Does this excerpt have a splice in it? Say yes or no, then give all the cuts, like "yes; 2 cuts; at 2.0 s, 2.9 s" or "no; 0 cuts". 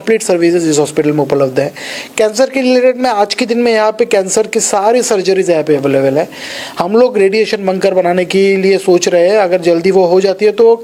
no; 0 cuts